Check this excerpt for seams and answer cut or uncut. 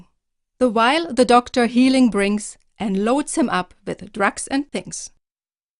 cut